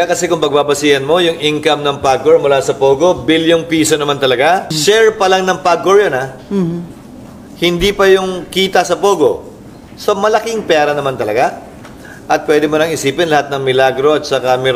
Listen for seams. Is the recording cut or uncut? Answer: cut